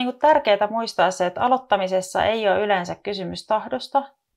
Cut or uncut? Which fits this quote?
uncut